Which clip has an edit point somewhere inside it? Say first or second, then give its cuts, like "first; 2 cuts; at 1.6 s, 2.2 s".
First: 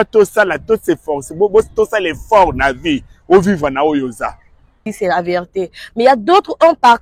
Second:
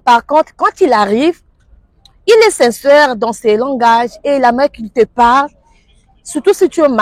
first; 1 cut; at 4.8 s